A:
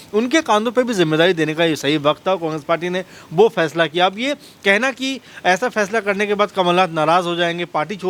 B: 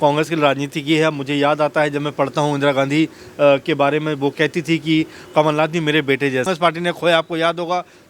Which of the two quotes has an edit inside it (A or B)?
B